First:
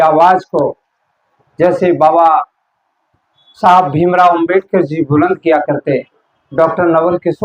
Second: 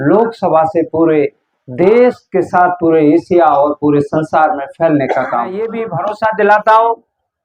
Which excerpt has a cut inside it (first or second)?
second